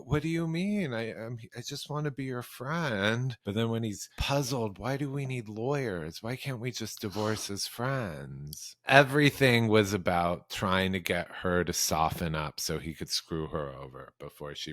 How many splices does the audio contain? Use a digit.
3